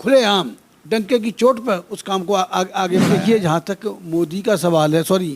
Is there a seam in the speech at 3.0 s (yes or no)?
yes